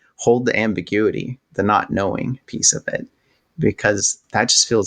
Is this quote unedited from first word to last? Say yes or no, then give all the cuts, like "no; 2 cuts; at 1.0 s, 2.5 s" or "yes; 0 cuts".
no; 1 cut; at 2.7 s